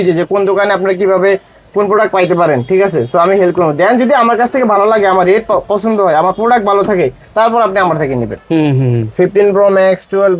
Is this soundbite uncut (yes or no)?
no